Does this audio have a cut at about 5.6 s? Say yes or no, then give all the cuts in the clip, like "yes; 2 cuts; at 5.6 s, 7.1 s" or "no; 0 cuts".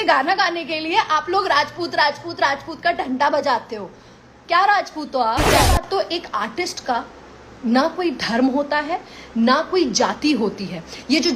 yes; 1 cut; at 5.6 s